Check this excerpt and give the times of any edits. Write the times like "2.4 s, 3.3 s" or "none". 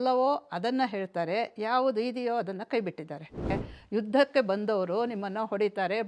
3.5 s